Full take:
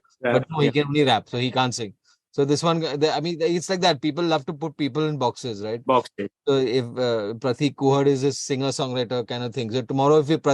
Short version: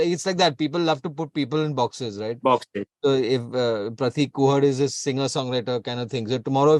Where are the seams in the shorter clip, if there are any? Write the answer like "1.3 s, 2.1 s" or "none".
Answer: none